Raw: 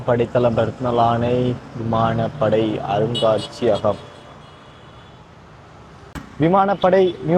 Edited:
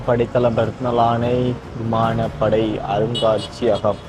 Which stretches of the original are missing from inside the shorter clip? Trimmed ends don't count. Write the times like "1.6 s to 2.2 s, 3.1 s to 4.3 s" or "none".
none